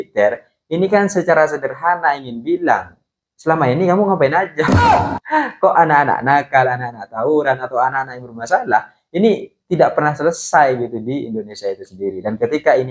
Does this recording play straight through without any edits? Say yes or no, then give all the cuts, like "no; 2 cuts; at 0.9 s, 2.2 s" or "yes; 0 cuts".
yes; 0 cuts